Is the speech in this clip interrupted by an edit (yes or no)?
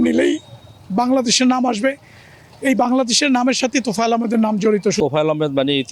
yes